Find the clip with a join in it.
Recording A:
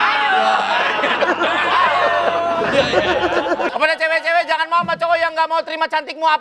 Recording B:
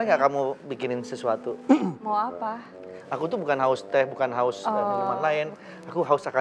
A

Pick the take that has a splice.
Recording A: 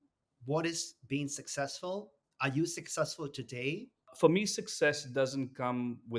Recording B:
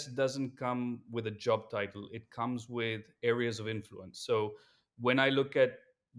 A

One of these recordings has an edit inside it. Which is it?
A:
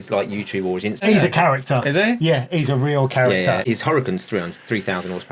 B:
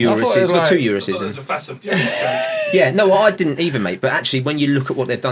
A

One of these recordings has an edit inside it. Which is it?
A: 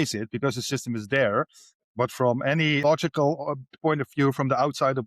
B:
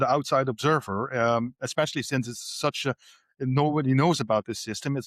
A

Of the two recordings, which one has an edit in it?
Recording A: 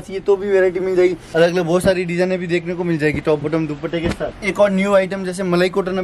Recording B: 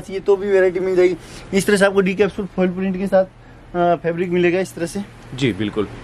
A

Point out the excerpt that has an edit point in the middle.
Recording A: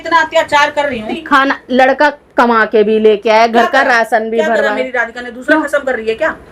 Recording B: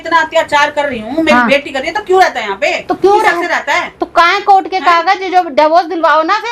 A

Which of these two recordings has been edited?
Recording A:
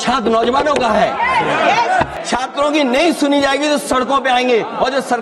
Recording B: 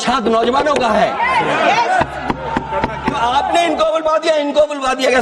A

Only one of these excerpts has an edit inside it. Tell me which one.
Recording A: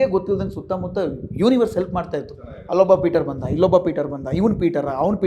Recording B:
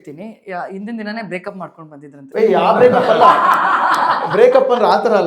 B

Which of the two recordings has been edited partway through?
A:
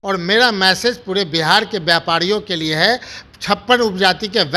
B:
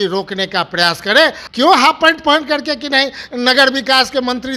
B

